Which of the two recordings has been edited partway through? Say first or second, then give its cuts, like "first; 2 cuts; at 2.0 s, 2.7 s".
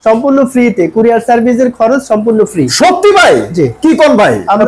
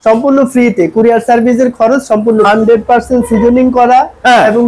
second; 1 cut; at 2.5 s